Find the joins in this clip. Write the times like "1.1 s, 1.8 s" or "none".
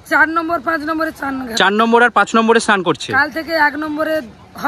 none